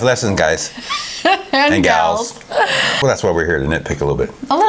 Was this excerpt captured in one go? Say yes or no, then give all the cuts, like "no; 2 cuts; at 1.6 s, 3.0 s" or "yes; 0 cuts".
no; 1 cut; at 3.0 s